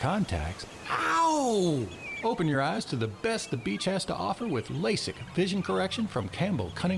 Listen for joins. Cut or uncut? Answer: uncut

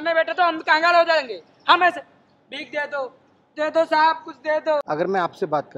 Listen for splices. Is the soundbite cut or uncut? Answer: cut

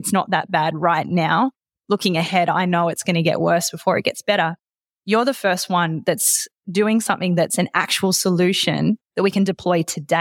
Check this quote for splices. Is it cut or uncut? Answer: cut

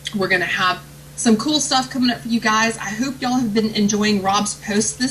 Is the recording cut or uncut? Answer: uncut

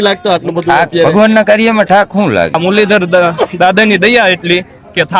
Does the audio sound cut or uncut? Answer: cut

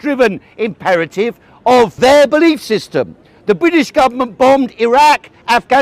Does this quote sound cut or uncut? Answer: cut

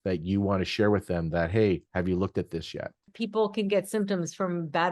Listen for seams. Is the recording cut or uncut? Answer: cut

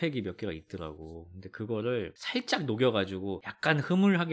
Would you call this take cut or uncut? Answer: uncut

